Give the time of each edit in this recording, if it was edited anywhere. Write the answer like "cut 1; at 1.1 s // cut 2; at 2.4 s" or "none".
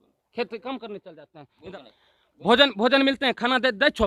cut 1; at 1.8 s

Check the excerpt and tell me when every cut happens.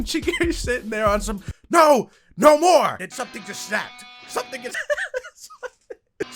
cut 1; at 4.8 s

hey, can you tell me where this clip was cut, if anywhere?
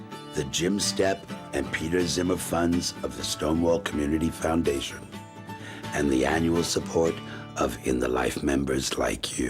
none

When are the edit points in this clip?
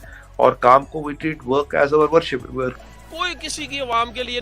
cut 1; at 2.9 s

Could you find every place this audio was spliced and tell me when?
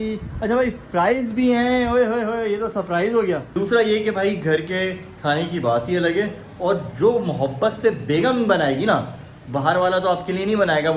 cut 1; at 3.5 s

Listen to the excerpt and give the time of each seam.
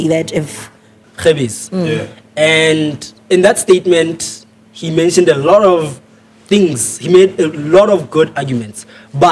cut 1; at 0.9 s

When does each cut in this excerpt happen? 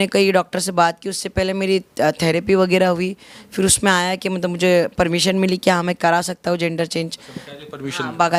none

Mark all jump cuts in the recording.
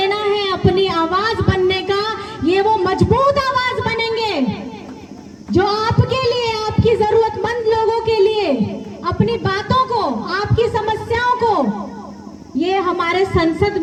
none

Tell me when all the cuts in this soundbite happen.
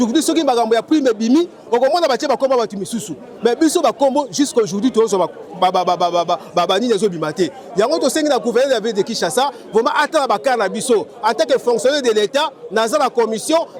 none

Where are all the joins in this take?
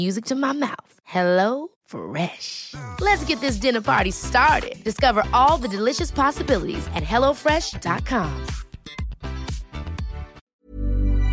cut 1; at 10.4 s

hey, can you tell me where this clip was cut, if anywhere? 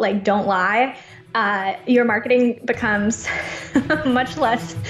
none

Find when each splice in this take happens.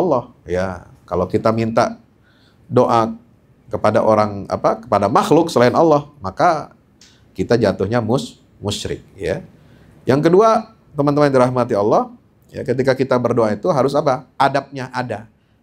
none

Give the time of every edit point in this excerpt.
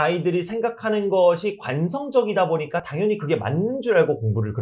none

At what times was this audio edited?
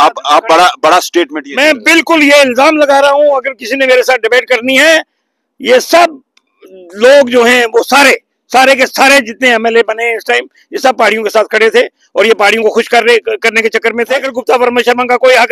cut 1; at 14.3 s

